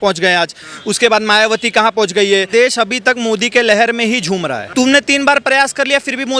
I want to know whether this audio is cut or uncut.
cut